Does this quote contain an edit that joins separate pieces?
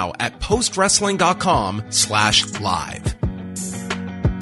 yes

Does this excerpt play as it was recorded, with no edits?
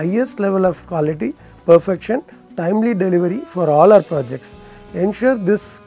yes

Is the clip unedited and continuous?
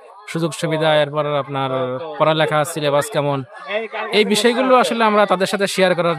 yes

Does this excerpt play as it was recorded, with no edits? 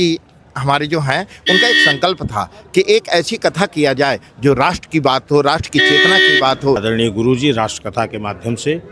no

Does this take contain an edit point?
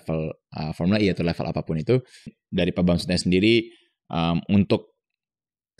yes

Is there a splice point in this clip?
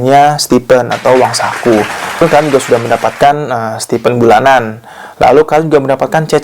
yes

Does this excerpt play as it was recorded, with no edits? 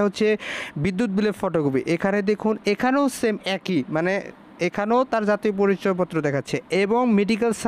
yes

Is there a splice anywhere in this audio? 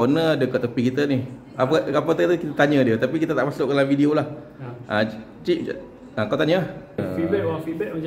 yes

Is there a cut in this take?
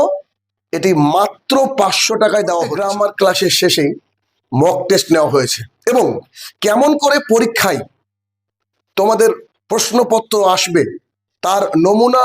yes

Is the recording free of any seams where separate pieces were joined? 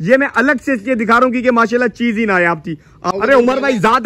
no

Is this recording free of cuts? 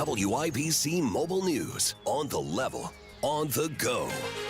yes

